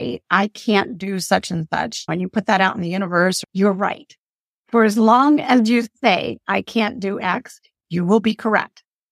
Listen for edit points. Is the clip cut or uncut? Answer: cut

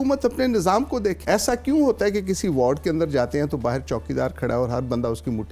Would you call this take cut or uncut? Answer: cut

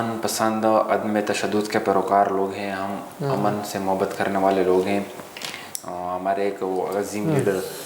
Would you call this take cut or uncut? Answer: uncut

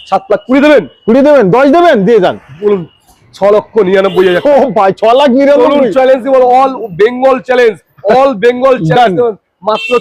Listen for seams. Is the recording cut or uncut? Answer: uncut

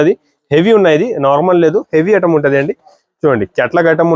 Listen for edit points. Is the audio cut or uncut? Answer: uncut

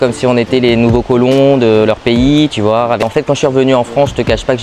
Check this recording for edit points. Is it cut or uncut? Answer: cut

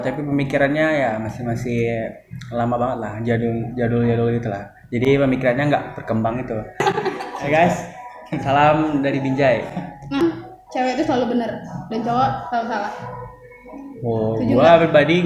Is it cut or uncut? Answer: cut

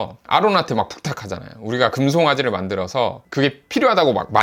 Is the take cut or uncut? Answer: uncut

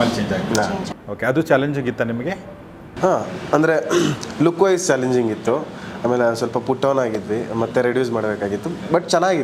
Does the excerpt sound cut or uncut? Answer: uncut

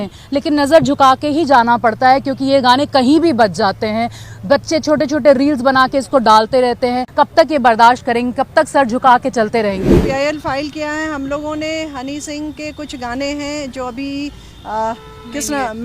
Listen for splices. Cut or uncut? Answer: cut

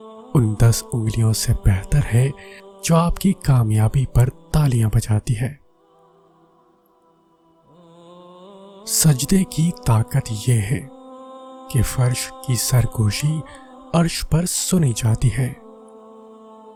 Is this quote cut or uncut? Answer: uncut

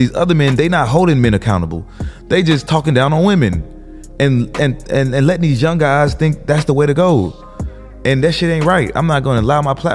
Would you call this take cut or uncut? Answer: uncut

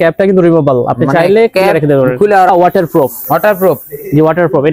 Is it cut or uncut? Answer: cut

